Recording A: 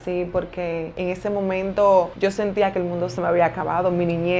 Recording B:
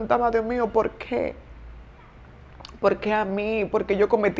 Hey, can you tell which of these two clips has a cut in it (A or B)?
A